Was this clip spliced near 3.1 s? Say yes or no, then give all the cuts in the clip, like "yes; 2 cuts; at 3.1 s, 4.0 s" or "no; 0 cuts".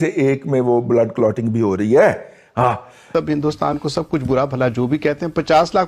yes; 1 cut; at 3.1 s